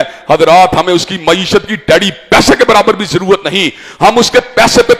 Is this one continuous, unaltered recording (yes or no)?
yes